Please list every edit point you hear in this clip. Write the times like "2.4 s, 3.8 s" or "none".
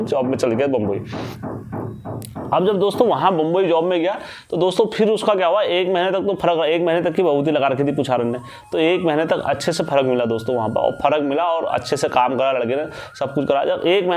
none